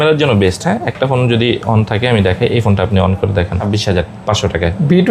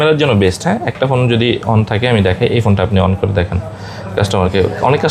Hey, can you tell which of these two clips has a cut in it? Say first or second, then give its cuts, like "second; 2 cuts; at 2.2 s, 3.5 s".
first; 1 cut; at 3.6 s